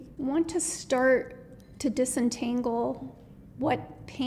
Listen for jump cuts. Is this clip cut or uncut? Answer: uncut